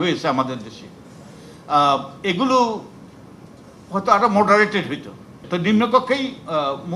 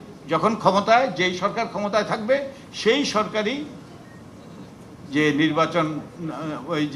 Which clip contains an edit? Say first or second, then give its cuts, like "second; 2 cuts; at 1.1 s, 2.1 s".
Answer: first; 1 cut; at 5.4 s